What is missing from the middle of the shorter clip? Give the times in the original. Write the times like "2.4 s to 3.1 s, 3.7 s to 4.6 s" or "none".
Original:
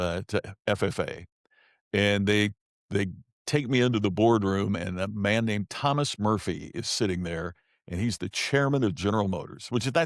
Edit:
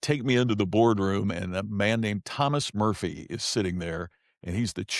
none